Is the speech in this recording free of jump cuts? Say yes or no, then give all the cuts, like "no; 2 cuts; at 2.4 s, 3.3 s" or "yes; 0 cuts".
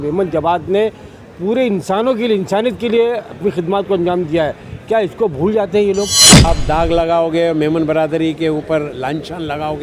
no; 1 cut; at 6.4 s